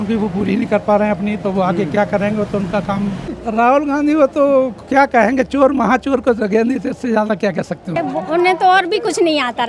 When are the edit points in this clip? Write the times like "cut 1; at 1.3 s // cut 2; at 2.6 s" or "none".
cut 1; at 3.3 s // cut 2; at 7.9 s

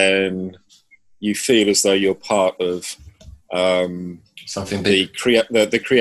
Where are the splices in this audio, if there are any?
none

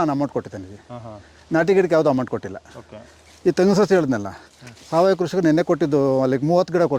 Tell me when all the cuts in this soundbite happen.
none

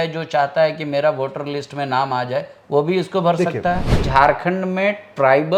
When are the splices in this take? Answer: cut 1; at 4.0 s

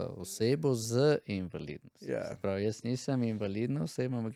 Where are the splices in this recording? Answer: none

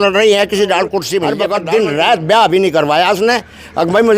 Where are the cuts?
cut 1; at 1.4 s

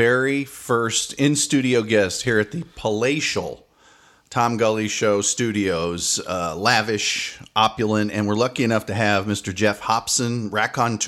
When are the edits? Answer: none

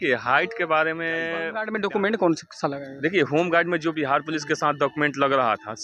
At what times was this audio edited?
cut 1; at 1.5 s

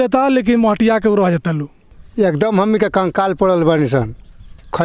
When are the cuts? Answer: none

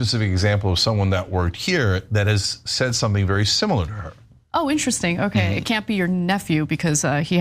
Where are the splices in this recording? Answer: none

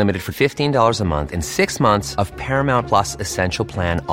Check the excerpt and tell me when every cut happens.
none

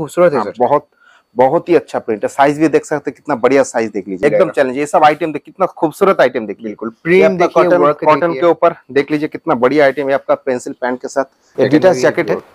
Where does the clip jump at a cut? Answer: cut 1; at 4.2 s // cut 2; at 11.4 s

